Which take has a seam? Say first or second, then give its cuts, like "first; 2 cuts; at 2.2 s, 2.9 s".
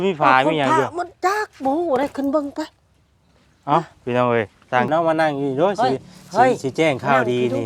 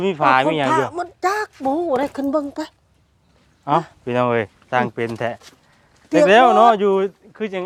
first; 1 cut; at 4.9 s